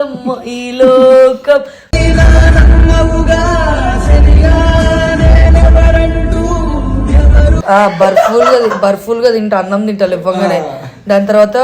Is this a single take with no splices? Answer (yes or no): no